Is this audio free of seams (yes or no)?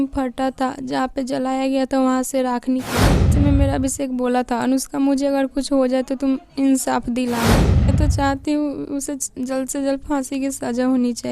no